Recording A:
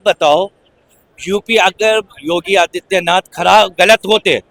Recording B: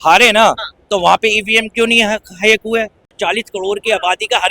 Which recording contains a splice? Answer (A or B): B